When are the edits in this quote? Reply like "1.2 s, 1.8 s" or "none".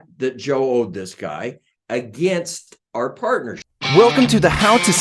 3.7 s